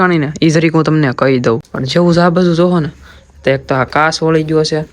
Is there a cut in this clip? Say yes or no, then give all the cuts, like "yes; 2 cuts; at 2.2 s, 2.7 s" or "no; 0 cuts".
yes; 1 cut; at 1.7 s